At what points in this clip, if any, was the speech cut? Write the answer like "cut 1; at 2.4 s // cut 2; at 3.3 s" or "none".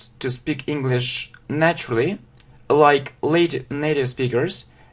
cut 1; at 1.0 s